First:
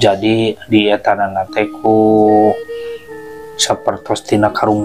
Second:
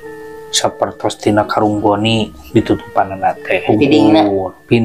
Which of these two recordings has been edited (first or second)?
second